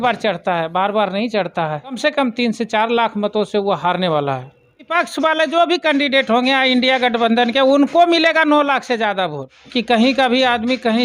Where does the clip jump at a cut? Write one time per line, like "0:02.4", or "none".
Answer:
0:02.0
0:04.8
0:09.6